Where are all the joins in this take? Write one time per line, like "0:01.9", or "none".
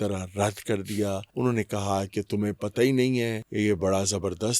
0:01.3
0:03.4